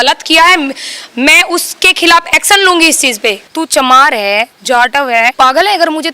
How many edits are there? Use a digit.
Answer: 2